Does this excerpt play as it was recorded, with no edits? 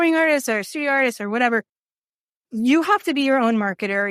yes; 0 cuts

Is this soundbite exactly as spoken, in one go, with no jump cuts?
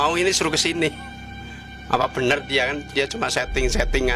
yes; 0 cuts

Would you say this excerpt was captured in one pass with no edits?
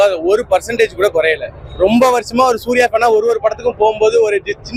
yes; 0 cuts

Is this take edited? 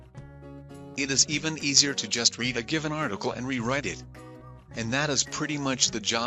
yes; 1 cut; at 0.9 s

